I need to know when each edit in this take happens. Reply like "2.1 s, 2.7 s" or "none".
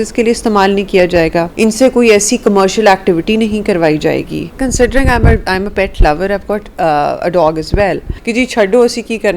1.5 s, 4.6 s, 8.1 s